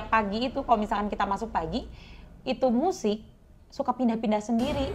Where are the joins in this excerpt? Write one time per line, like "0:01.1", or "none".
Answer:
none